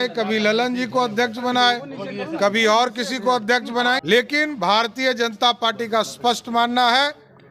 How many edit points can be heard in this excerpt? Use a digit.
1